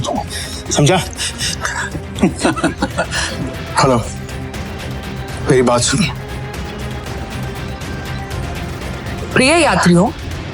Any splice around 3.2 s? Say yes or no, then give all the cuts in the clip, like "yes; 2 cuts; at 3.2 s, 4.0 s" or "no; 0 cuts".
yes; 2 cuts; at 3.2 s, 7.0 s